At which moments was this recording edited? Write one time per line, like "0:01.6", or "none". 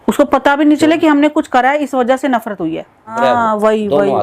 0:03.2